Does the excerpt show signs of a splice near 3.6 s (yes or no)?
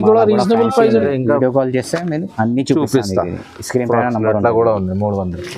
no